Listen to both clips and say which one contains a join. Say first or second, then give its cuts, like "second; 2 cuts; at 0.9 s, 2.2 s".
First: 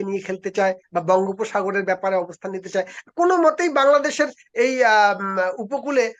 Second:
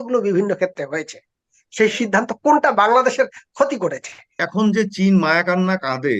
second; 1 cut; at 4.4 s